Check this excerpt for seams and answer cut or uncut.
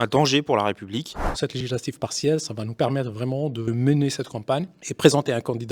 cut